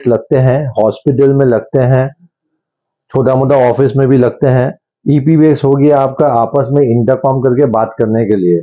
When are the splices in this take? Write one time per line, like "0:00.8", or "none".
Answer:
none